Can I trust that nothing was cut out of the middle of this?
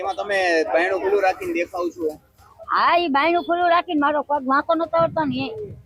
yes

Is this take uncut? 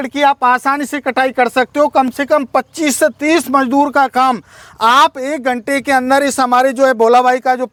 yes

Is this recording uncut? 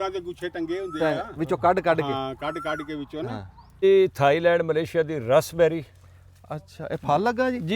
no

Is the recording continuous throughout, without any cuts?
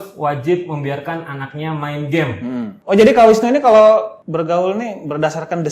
no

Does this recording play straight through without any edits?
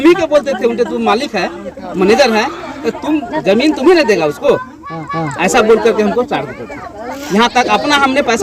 yes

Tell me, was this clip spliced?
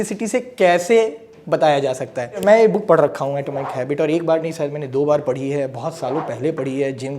yes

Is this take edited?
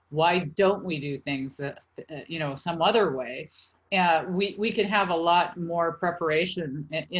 no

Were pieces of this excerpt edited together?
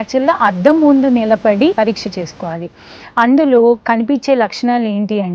yes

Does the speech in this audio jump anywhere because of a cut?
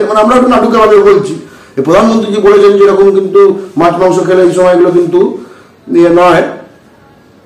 no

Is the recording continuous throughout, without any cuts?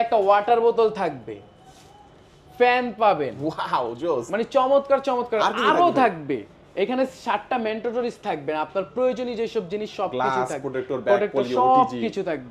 yes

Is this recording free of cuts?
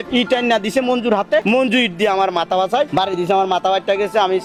yes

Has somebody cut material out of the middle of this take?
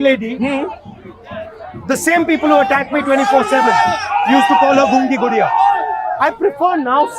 yes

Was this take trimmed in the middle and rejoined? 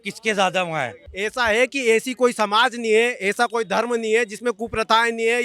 yes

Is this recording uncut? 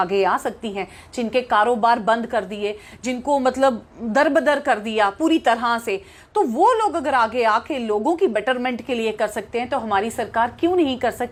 yes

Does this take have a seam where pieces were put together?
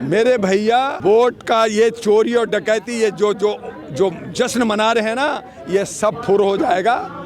yes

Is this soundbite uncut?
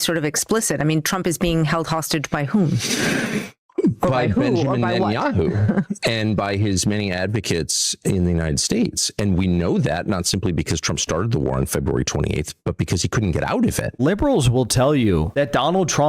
no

